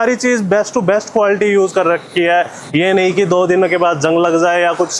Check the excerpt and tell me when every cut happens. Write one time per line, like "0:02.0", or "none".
none